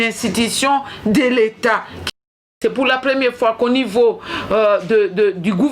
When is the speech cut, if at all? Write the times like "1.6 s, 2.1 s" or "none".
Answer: 2.4 s

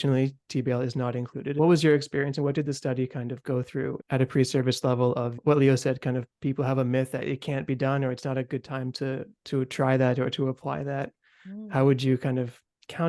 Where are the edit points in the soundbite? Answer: 1.6 s, 4.0 s, 5.4 s

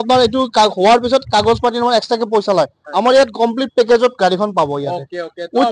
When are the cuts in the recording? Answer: none

